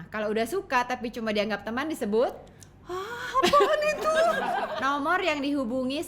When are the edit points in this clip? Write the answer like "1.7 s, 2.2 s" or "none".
4.6 s